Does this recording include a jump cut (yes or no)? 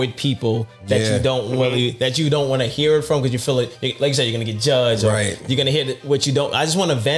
no